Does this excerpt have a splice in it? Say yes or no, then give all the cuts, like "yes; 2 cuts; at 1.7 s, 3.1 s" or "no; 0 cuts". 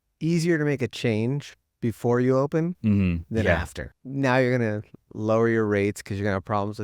yes; 1 cut; at 3.8 s